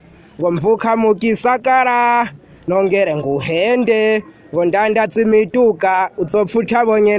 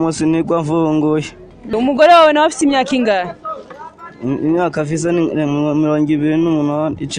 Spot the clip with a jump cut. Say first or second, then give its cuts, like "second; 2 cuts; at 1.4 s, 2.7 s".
second; 1 cut; at 1.7 s